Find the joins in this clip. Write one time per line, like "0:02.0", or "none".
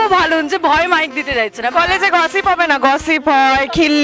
0:01.7